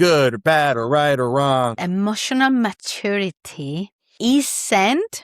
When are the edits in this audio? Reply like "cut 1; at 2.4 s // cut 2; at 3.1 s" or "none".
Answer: cut 1; at 1.8 s // cut 2; at 4.0 s